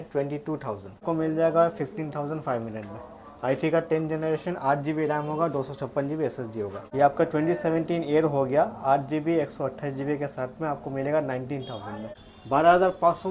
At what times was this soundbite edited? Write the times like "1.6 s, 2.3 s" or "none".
1.0 s, 6.8 s, 12.1 s